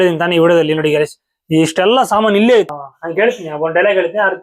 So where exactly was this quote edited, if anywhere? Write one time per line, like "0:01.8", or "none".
0:02.7